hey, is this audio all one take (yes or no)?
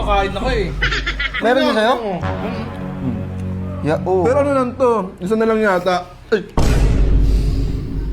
no